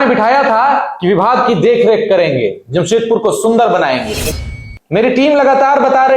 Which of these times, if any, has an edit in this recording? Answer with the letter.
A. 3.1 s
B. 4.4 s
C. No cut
B